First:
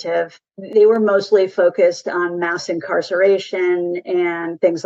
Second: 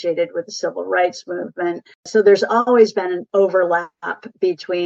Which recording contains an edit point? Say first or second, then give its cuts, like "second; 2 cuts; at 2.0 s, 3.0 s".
second; 2 cuts; at 2.0 s, 3.3 s